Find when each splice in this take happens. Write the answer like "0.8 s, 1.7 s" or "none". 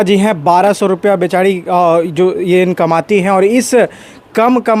none

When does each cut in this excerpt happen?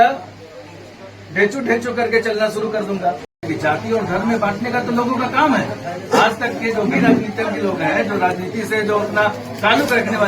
3.4 s

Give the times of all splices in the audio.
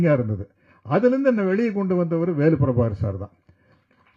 none

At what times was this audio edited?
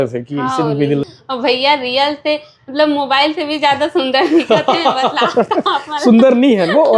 1.0 s

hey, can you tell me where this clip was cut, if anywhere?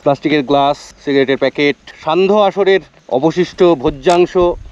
0.9 s, 1.9 s, 3.0 s

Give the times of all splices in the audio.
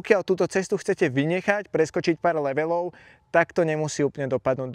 none

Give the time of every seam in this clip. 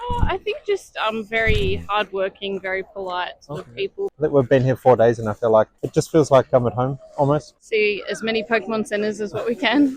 4.0 s, 7.5 s

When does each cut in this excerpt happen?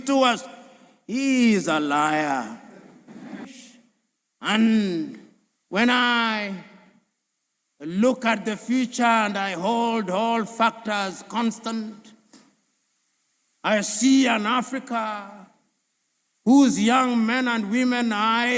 3.5 s

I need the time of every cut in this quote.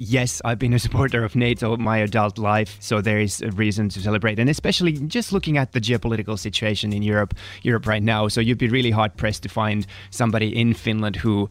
1.8 s, 2.8 s

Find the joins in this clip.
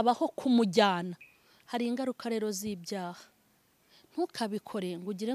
1.3 s

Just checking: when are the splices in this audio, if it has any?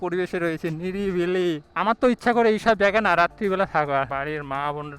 4.1 s

